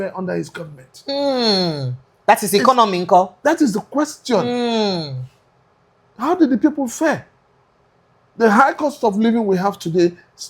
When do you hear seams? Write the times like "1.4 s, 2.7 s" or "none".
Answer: none